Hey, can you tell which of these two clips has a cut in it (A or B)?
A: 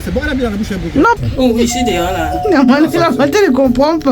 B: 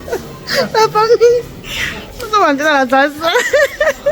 A